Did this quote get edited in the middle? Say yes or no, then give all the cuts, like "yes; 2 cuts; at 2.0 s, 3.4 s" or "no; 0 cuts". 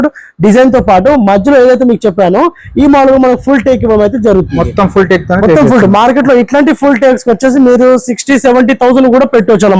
no; 0 cuts